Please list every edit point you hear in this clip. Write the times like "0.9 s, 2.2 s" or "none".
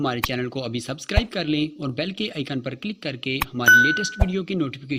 none